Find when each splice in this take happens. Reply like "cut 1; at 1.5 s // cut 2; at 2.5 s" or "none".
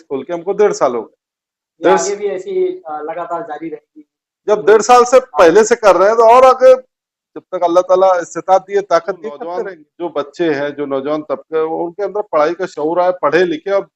cut 1; at 9.8 s